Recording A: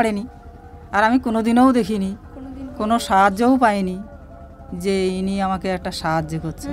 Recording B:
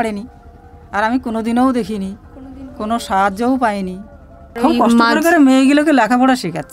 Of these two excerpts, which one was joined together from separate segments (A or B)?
B